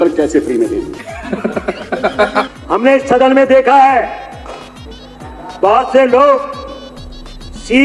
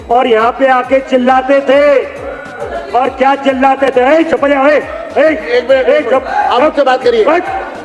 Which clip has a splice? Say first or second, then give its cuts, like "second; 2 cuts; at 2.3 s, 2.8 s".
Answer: first; 1 cut; at 2.5 s